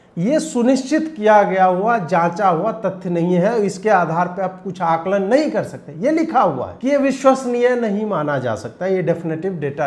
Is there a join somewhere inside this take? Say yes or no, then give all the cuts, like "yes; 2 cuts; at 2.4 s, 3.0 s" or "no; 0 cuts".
yes; 1 cut; at 6.7 s